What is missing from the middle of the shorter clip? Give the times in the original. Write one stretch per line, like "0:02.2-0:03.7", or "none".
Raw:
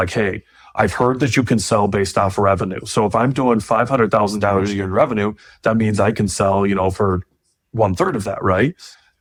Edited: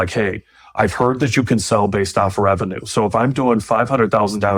none